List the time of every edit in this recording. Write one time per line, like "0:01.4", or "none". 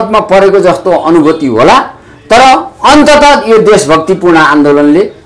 none